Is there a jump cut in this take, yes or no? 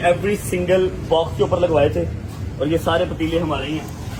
no